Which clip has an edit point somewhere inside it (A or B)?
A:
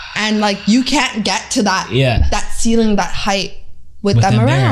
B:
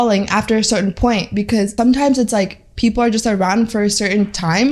B